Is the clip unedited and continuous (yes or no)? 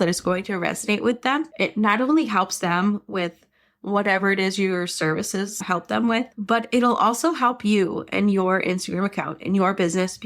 no